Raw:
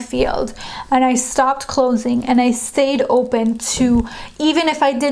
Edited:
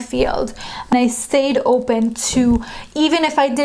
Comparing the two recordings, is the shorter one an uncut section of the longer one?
no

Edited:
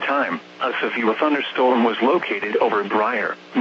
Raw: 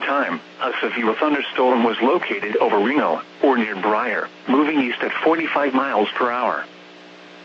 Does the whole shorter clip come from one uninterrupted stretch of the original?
no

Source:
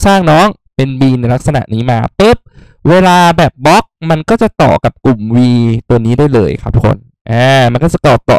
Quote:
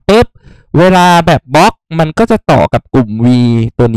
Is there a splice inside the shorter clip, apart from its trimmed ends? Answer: no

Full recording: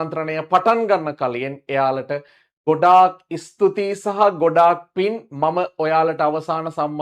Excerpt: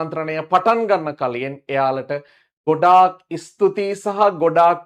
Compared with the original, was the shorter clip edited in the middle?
no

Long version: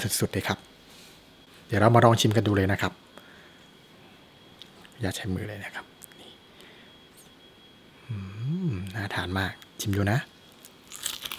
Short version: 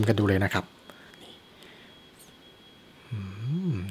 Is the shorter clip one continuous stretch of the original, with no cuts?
no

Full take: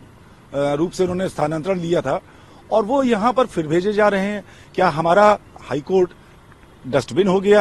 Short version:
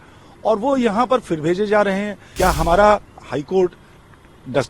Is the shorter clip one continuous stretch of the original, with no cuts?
no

